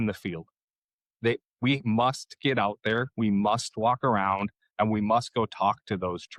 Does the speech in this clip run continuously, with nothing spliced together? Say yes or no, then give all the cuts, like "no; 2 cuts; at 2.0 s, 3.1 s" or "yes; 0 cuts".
yes; 0 cuts